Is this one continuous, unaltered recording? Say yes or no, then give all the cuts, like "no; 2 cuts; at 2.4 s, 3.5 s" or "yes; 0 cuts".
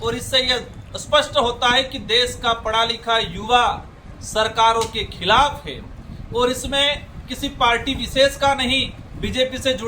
yes; 0 cuts